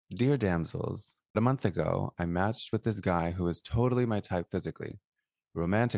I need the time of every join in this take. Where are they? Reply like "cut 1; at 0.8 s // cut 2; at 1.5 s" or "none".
cut 1; at 1.3 s